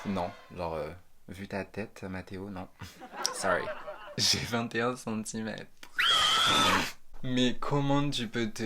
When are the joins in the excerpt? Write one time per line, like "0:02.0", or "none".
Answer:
0:03.8